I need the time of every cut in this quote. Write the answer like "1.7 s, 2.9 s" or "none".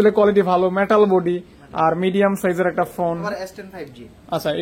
3.2 s